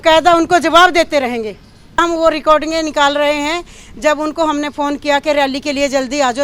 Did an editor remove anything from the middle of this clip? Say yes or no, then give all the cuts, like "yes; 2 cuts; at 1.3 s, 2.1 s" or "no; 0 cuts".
yes; 1 cut; at 2.0 s